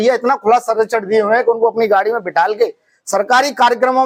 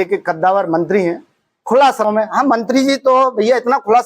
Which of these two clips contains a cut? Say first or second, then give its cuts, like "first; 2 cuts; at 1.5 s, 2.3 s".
second; 1 cut; at 2.1 s